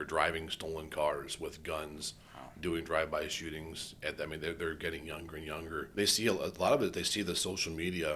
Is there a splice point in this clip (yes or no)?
yes